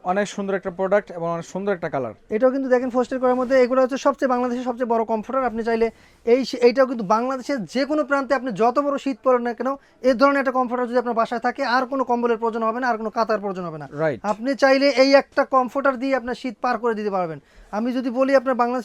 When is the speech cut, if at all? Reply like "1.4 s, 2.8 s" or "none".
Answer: none

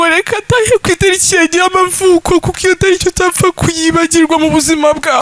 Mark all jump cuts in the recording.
none

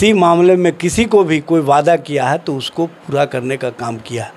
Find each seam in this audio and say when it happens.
none

